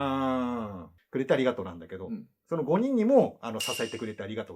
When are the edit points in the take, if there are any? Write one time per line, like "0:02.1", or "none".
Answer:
0:01.0